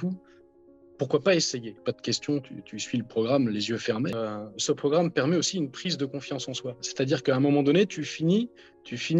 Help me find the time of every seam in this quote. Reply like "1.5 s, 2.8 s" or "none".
1.7 s, 4.2 s